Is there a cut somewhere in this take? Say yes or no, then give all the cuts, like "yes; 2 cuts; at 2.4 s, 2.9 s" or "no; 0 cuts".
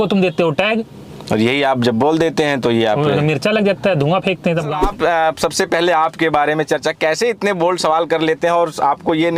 yes; 1 cut; at 4.8 s